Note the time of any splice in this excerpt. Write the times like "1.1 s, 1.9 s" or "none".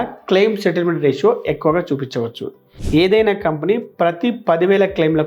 2.7 s